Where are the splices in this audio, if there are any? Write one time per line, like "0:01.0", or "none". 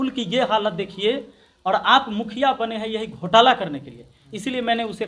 none